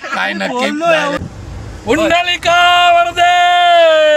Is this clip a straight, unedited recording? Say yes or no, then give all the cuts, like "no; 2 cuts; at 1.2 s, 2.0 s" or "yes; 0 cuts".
no; 1 cut; at 1.2 s